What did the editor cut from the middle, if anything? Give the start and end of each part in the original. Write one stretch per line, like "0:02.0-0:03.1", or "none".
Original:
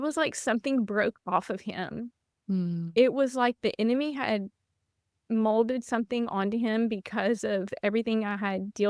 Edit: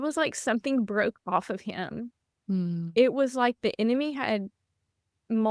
none